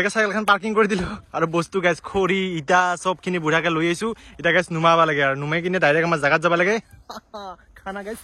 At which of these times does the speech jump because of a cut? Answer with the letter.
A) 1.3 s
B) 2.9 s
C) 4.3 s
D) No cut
D